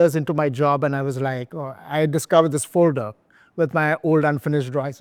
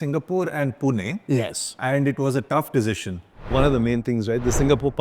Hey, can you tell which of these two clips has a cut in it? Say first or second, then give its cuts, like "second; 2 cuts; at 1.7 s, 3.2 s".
second; 1 cut; at 3.5 s